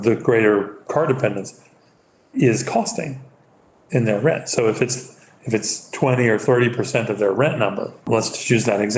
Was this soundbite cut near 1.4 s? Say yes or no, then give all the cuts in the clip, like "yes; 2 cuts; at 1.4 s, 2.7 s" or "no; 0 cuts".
no; 1 cut; at 8.1 s